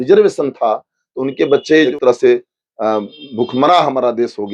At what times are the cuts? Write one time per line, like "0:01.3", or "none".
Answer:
0:01.9